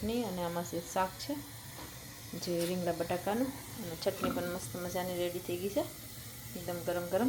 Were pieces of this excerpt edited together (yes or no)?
no